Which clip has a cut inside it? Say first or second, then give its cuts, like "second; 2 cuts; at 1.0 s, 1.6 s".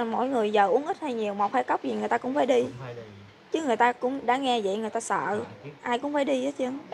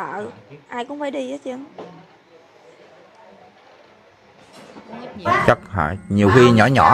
second; 1 cut; at 5.2 s